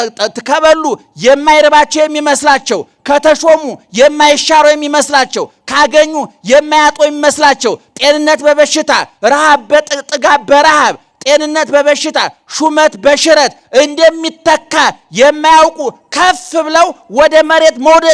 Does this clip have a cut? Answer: no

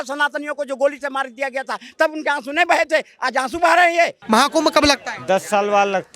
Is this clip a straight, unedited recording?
no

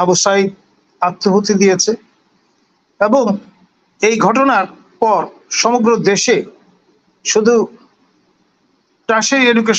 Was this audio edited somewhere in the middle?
no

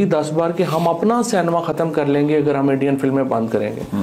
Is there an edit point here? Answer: no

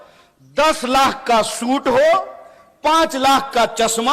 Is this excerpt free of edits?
yes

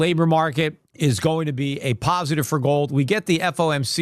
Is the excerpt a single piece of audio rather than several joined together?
yes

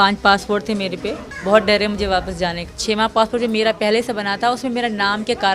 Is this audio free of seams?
no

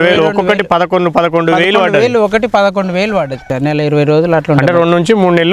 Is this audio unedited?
no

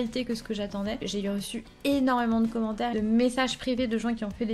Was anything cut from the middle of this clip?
yes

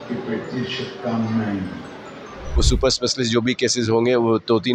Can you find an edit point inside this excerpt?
yes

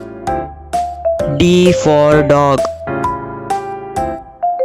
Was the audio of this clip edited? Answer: no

